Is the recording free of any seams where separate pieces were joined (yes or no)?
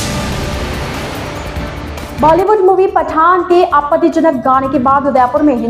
no